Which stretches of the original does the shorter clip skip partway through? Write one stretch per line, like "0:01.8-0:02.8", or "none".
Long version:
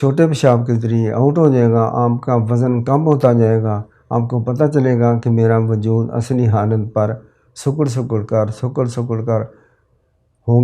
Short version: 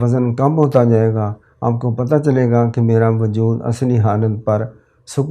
none